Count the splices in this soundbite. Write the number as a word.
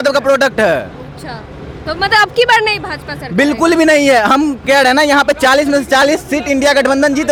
zero